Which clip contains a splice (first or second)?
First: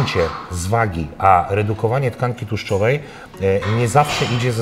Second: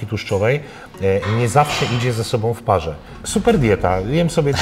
second